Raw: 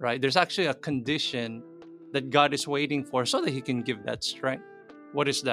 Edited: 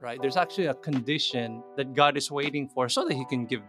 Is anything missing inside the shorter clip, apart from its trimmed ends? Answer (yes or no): yes